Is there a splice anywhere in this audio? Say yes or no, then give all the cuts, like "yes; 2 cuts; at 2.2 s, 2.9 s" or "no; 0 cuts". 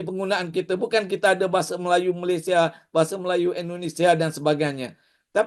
no; 0 cuts